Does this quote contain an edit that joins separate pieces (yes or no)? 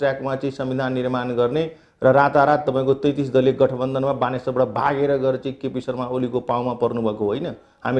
no